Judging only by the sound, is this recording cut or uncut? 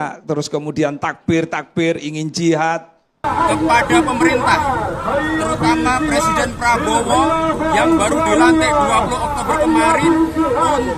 uncut